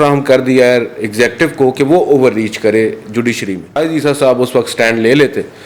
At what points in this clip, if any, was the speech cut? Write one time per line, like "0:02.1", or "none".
0:03.8